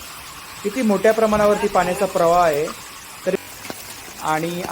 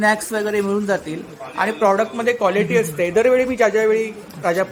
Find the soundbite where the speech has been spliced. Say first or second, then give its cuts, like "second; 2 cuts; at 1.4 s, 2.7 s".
first; 1 cut; at 3.3 s